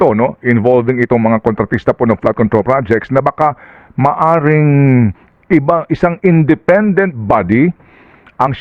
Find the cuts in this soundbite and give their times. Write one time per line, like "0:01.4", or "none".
none